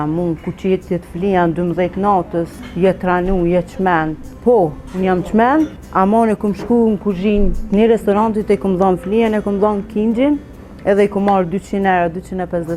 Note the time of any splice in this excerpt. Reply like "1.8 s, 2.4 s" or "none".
2.6 s, 4.2 s, 5.8 s